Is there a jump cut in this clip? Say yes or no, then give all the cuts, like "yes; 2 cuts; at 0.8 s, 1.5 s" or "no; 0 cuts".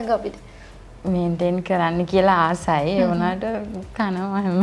no; 0 cuts